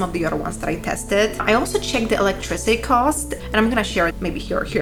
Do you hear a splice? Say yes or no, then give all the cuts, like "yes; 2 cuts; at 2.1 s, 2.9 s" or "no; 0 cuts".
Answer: no; 0 cuts